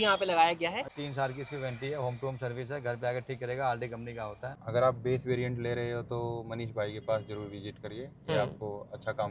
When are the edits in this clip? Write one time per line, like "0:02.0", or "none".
0:00.9
0:04.6